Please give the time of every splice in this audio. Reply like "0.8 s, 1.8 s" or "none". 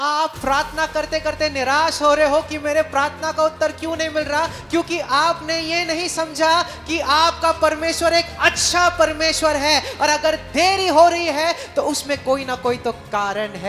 none